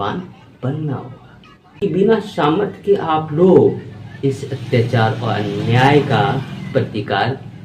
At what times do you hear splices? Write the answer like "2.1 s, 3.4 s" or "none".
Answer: 1.6 s